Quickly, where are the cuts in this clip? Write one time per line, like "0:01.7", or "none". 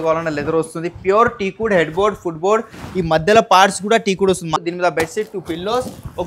0:04.6